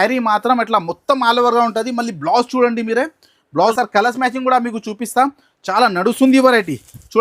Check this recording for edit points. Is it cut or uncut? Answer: cut